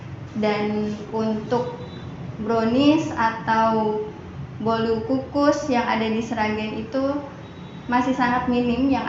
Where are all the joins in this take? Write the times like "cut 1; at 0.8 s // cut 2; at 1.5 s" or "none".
none